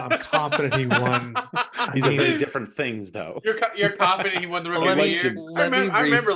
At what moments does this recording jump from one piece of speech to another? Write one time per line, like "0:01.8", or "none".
none